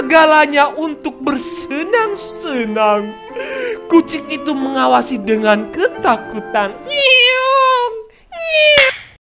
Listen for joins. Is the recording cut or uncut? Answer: uncut